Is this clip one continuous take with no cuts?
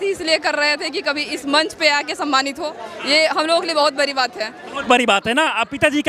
yes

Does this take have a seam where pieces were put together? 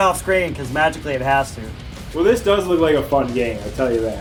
no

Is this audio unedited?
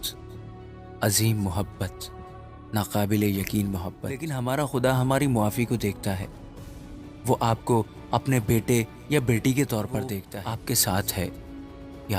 no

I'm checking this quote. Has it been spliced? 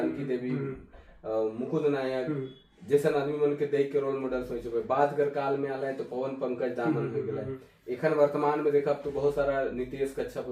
no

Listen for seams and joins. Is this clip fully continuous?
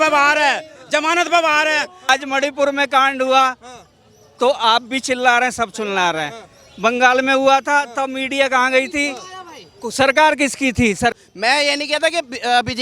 no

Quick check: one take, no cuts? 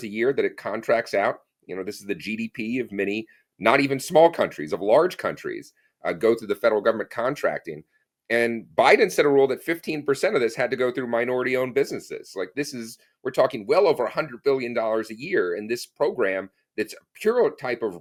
yes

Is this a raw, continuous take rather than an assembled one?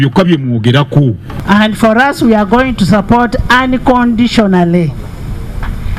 no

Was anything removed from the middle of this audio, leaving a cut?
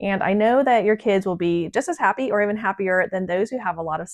no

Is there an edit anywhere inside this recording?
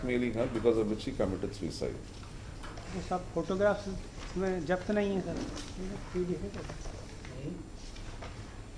no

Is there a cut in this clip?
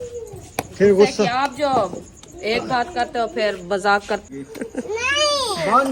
yes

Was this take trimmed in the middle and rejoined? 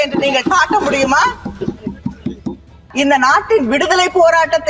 yes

